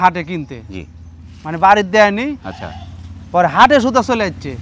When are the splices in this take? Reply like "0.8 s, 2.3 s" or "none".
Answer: none